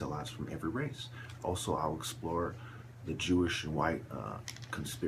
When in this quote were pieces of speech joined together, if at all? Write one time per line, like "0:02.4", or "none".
0:02.0